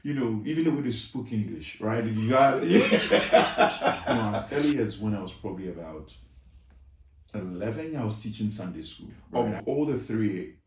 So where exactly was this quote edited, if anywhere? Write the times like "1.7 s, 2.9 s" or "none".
4.4 s, 9.2 s